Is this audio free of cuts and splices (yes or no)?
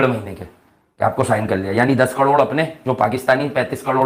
yes